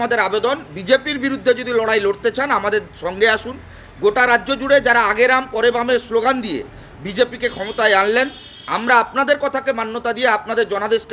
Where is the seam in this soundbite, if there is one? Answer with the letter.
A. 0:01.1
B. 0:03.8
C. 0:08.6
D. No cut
D